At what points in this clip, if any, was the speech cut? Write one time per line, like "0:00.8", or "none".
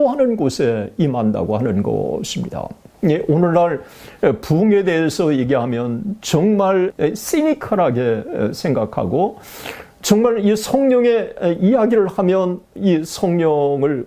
0:06.9